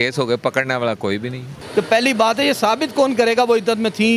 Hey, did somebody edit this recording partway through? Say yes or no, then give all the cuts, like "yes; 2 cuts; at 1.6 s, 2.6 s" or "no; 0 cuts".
yes; 1 cut; at 1.5 s